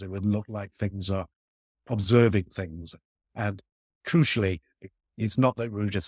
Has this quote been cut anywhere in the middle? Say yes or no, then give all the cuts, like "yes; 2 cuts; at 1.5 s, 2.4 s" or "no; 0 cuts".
yes; 2 cuts; at 1.8 s, 5.0 s